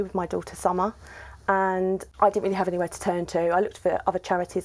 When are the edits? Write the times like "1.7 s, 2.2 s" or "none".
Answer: 2.1 s